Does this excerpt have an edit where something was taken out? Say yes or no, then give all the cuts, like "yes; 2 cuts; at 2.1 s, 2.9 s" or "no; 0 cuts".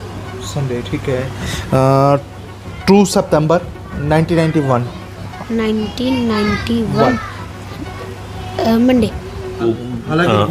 yes; 1 cut; at 9.6 s